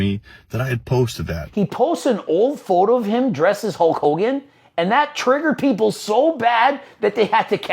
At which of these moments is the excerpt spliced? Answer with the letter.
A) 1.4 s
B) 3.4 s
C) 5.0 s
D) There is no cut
A